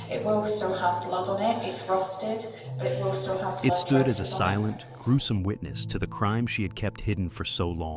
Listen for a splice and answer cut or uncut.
cut